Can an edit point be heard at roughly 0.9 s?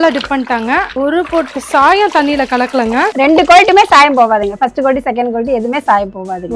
yes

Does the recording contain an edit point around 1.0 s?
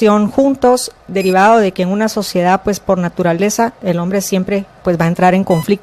yes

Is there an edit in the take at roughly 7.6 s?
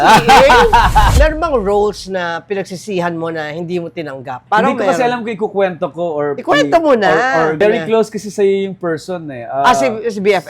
yes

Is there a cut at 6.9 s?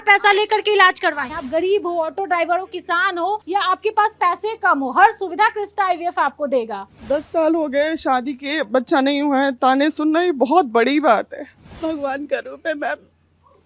yes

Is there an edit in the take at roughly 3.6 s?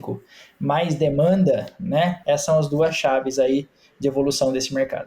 no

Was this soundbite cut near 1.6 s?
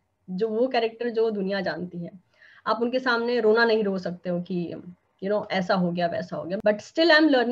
no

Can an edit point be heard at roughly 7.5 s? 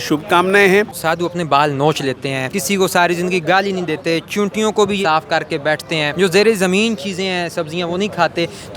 no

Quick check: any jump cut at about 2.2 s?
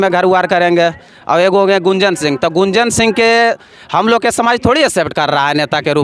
no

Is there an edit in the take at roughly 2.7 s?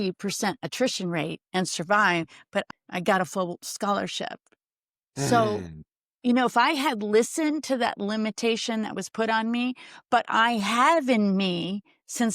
yes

